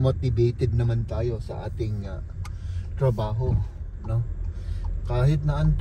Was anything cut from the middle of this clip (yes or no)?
no